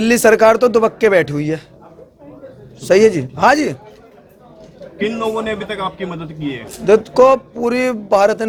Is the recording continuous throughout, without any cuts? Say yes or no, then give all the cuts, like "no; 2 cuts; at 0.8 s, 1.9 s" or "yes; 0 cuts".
yes; 0 cuts